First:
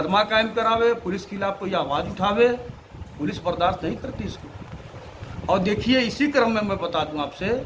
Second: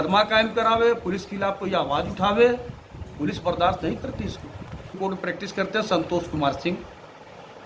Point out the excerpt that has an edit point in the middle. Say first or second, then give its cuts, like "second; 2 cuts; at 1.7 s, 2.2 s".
second; 1 cut; at 5.0 s